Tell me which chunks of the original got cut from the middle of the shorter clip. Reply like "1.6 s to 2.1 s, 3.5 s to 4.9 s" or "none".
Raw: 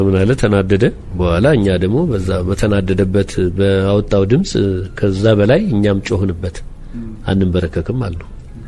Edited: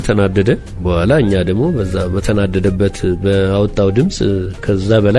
none